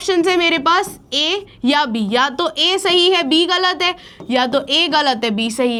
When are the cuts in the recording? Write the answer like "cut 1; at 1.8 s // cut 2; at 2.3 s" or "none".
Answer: none